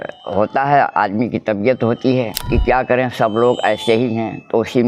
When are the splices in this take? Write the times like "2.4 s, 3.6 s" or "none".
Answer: 2.4 s